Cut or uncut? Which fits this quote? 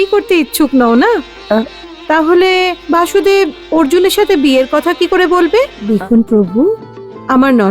cut